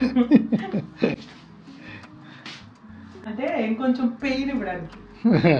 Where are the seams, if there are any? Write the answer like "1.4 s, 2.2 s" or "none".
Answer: none